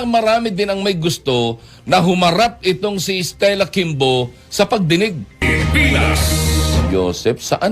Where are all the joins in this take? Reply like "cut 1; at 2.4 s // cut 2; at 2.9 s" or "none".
cut 1; at 5.4 s